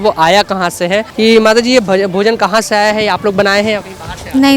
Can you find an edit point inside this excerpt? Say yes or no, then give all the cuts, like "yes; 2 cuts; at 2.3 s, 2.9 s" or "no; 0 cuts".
yes; 1 cut; at 1.1 s